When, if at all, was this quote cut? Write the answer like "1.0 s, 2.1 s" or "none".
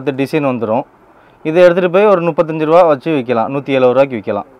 none